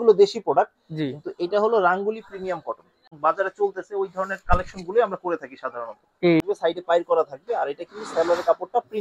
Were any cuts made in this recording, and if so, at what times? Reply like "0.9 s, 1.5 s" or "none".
3.1 s, 6.4 s